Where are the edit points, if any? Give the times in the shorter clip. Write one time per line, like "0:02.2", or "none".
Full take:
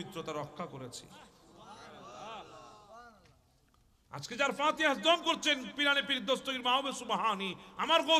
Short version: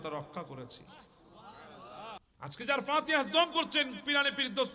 0:02.2